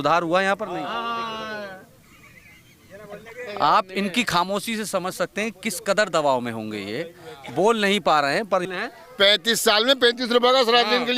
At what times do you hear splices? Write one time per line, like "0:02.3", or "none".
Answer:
0:08.7